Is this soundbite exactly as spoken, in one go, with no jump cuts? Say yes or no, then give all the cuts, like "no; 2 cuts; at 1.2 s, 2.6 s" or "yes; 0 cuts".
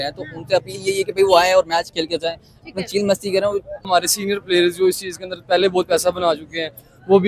no; 1 cut; at 3.9 s